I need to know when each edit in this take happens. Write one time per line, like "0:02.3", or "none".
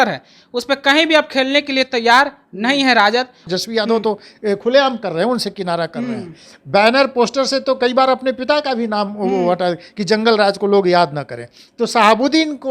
0:03.5